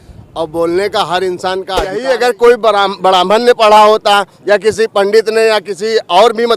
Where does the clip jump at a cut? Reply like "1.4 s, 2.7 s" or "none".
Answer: 2.0 s